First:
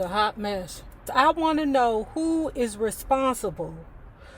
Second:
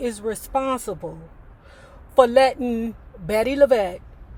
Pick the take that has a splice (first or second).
first